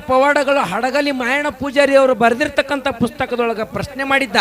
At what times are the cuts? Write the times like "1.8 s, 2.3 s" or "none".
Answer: none